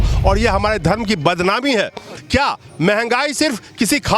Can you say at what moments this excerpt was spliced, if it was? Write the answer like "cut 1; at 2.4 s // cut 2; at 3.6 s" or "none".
cut 1; at 2.1 s